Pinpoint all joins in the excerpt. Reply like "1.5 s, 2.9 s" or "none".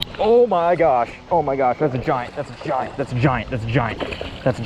1.2 s